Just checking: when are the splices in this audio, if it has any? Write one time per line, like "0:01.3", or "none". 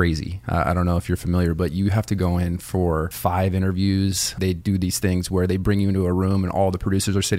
0:03.1
0:04.4